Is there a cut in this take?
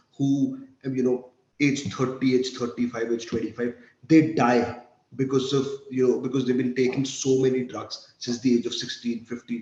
no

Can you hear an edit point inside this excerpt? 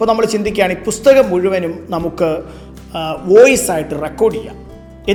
no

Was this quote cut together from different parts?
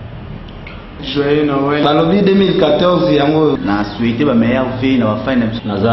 yes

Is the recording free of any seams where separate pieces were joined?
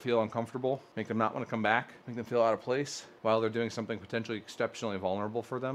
no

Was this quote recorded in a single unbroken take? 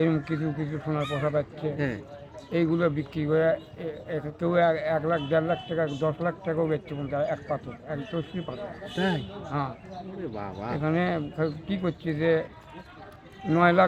yes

